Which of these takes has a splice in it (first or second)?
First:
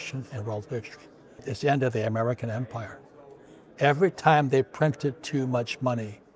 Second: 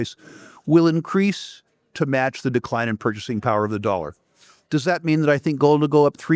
first